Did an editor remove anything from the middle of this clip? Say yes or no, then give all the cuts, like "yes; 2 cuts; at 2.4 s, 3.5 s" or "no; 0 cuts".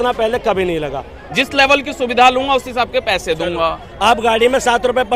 yes; 1 cut; at 1.1 s